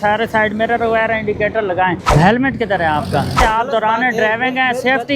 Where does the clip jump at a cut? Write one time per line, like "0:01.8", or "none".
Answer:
0:02.1
0:03.4